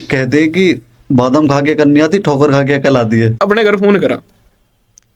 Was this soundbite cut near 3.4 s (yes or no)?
yes